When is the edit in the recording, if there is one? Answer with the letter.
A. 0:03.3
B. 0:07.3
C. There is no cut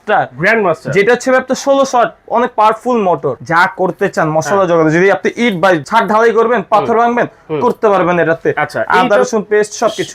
A